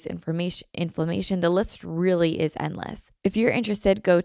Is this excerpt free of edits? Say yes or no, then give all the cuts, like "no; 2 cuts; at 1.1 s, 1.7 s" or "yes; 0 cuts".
no; 1 cut; at 3.0 s